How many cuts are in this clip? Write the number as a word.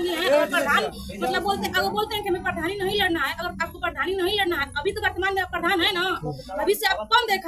zero